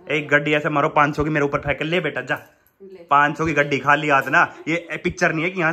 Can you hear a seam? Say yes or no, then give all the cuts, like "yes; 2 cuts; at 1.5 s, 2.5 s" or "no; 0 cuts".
no; 0 cuts